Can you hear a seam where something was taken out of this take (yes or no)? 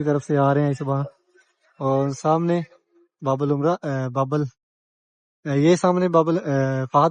no